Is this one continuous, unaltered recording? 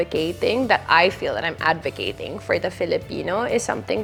yes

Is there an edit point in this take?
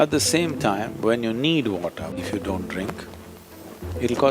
yes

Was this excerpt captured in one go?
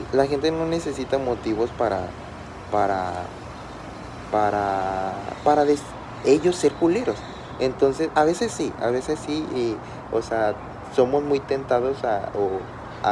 yes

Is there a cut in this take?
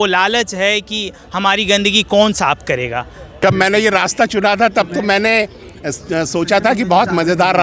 yes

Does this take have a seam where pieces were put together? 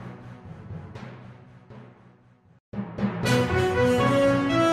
no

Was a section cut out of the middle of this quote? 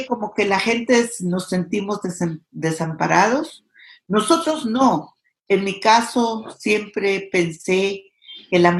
no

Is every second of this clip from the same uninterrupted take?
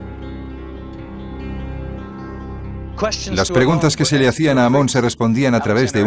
no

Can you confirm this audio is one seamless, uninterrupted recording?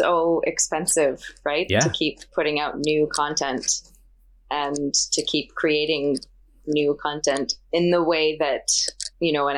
yes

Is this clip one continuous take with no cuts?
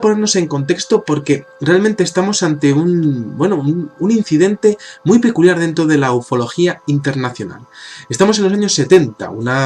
yes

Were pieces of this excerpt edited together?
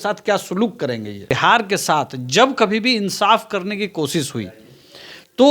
yes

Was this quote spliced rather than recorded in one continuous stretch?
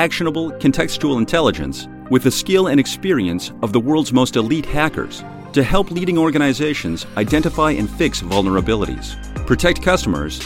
no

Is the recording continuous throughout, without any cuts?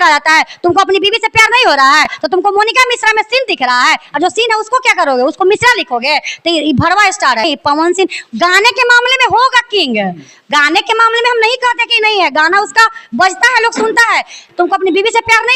no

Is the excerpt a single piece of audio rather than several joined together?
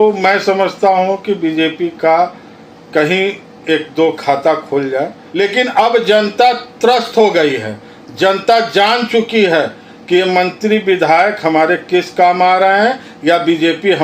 no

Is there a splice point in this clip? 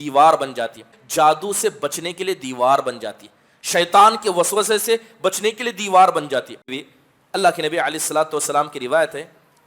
yes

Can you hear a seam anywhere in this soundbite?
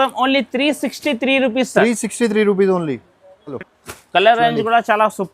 yes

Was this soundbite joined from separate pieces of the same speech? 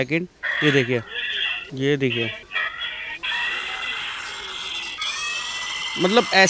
no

